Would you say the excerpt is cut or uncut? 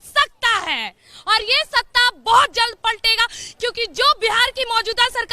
uncut